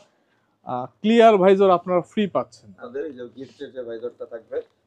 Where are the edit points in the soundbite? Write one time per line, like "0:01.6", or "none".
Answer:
0:02.9